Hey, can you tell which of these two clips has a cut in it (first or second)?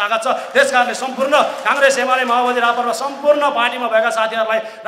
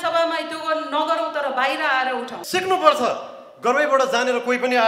second